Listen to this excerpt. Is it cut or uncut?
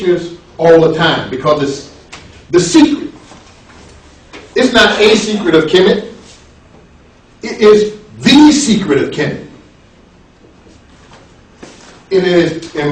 uncut